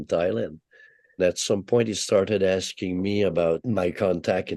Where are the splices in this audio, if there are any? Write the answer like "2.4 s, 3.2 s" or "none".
1.2 s, 3.6 s